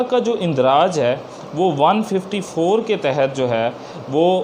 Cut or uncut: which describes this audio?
uncut